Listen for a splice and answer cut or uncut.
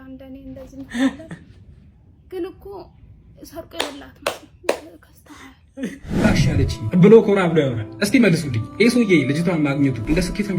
cut